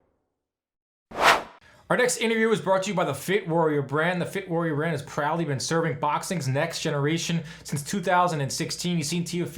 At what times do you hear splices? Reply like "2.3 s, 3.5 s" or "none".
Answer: 1.4 s